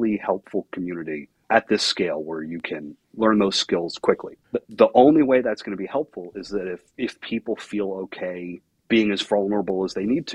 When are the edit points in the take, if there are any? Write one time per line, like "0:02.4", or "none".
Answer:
0:01.3
0:03.0
0:04.3
0:06.9
0:08.7

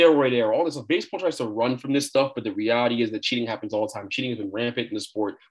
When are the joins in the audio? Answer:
none

